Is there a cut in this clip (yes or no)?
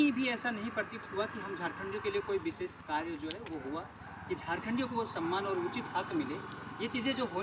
no